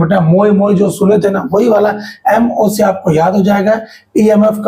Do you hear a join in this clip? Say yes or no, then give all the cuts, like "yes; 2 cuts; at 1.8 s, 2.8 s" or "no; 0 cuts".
no; 0 cuts